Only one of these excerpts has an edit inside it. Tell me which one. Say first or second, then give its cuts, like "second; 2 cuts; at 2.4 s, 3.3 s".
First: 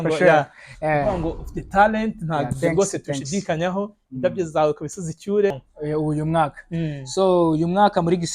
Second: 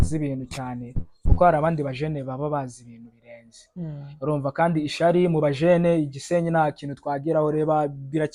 first; 1 cut; at 5.7 s